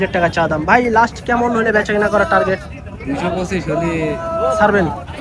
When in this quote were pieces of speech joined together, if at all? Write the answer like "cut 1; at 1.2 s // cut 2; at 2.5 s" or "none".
none